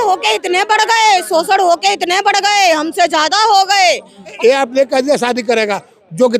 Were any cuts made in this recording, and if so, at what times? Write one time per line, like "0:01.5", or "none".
0:04.3